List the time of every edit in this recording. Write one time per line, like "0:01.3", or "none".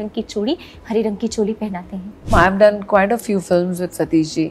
0:02.3